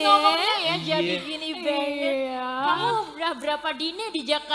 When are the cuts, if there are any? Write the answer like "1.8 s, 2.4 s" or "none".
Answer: none